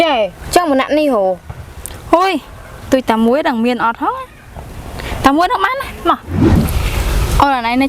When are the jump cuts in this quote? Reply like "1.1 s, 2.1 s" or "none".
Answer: 6.4 s